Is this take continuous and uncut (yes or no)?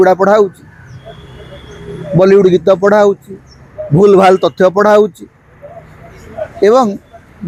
yes